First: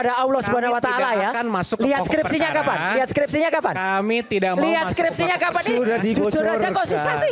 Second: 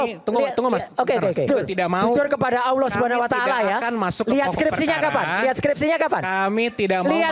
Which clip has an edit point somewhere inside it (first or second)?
second